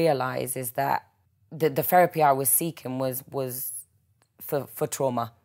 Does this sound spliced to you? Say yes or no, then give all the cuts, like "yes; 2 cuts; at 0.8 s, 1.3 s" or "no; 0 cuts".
yes; 1 cut; at 1.2 s